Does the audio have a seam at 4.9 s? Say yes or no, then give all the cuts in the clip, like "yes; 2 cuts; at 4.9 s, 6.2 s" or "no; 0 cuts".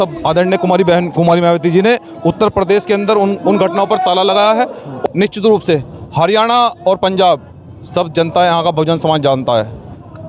yes; 1 cut; at 4.9 s